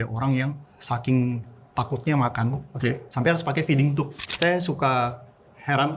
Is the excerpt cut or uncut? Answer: cut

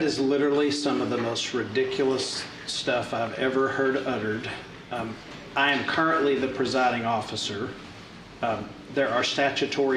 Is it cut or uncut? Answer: uncut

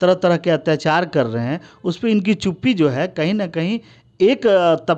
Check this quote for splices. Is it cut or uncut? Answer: uncut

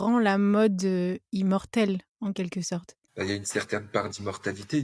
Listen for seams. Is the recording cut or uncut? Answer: uncut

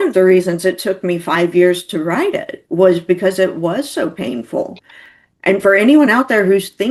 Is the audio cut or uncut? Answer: uncut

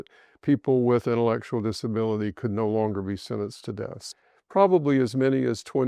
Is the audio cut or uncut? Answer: cut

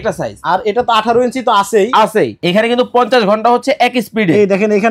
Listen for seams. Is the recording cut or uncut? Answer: cut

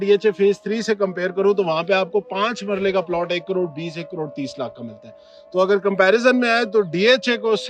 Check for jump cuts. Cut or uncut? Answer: uncut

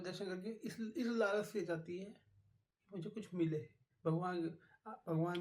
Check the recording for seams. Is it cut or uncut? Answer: uncut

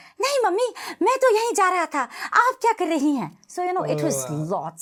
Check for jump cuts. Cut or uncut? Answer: uncut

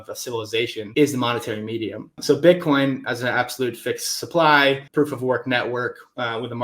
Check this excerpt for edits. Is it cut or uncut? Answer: cut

